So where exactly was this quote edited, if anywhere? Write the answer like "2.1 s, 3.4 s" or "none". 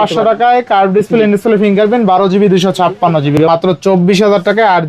3.4 s